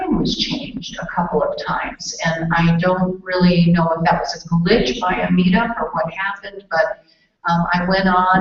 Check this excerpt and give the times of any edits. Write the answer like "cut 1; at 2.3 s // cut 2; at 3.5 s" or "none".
none